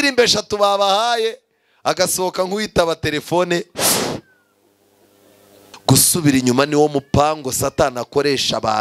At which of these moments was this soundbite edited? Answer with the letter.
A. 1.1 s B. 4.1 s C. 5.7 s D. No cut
C